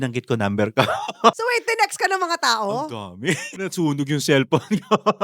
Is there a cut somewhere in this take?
yes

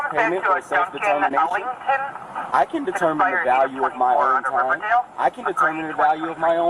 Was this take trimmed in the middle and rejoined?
no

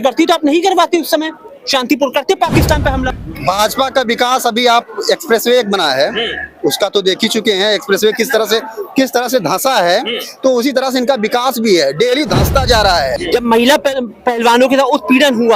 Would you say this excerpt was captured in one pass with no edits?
no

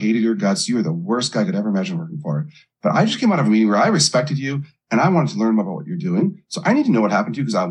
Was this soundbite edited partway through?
no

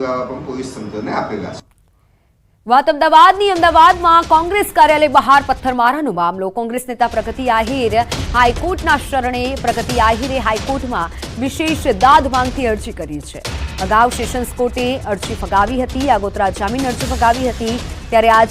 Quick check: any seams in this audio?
yes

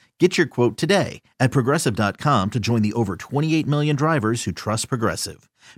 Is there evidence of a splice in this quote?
no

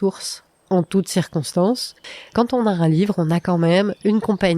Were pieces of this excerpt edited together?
yes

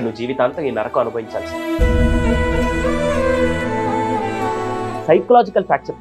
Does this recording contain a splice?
yes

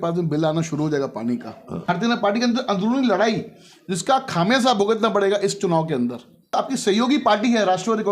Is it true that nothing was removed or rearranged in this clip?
no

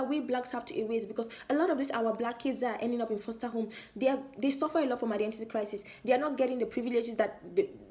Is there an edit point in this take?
no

